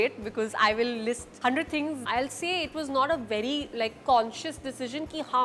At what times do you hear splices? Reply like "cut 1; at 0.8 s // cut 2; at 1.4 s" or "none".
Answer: cut 1; at 2.0 s